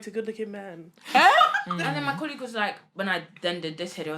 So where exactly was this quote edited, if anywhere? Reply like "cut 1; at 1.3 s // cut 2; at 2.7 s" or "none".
cut 1; at 1.5 s